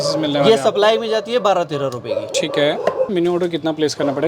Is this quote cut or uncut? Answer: cut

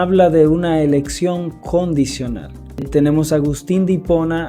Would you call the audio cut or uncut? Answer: cut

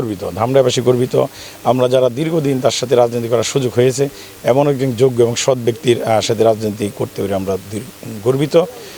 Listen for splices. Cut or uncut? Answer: uncut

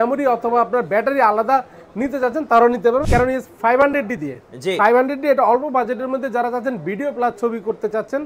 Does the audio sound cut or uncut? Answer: cut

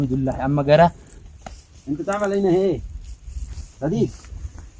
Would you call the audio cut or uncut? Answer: cut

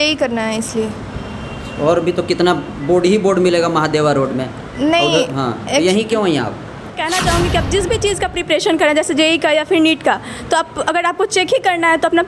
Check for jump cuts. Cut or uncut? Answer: cut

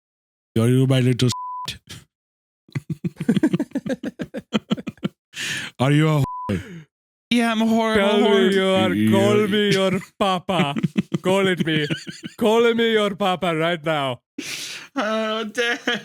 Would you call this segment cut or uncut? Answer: uncut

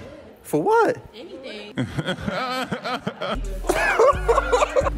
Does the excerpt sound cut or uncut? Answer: cut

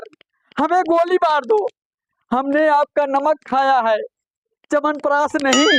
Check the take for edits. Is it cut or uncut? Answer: uncut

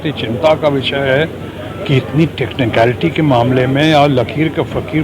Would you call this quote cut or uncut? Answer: uncut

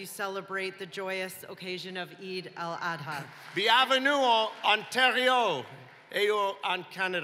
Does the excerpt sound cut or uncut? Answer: cut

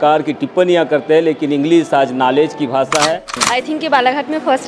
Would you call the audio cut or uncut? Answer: cut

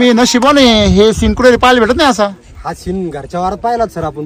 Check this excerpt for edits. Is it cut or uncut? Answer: uncut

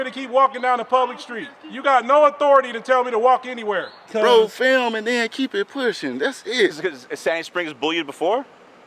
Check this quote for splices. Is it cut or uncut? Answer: cut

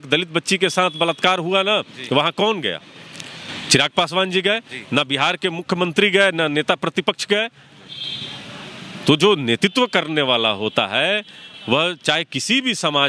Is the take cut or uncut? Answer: uncut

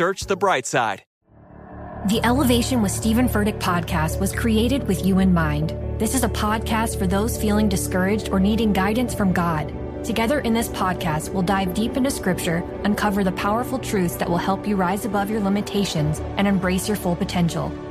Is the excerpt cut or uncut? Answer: uncut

